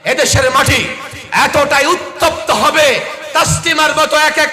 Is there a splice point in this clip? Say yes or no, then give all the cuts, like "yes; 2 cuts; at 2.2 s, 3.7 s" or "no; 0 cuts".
no; 0 cuts